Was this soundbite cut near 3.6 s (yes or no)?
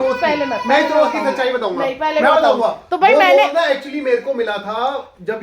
no